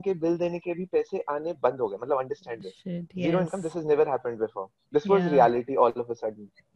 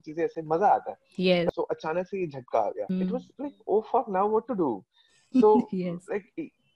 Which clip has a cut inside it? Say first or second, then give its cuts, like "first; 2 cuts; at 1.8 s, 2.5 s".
second; 2 cuts; at 1.5 s, 2.9 s